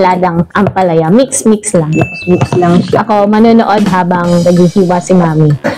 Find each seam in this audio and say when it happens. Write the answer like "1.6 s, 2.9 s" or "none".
none